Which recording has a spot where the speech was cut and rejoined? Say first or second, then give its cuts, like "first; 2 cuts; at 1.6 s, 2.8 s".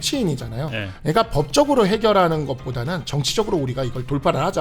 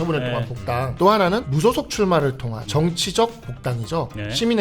second; 3 cuts; at 0.9 s, 1.5 s, 2.5 s